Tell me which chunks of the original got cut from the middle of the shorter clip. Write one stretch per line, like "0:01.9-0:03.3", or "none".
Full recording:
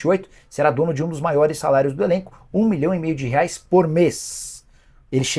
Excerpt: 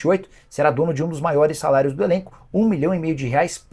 none